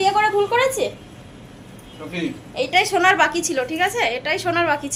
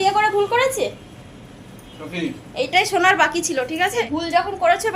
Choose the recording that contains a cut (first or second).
second